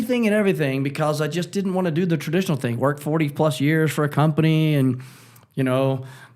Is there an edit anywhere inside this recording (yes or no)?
no